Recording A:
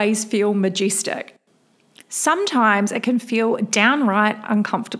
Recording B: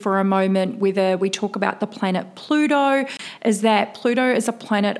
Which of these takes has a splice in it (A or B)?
B